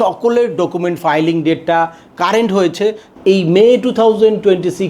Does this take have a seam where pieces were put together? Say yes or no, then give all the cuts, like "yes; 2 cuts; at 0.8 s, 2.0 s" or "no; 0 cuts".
yes; 1 cut; at 3.1 s